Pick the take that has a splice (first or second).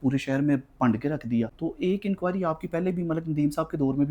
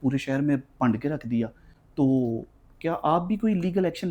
first